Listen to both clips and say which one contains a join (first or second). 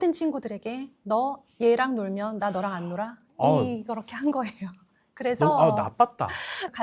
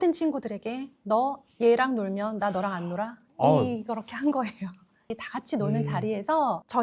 second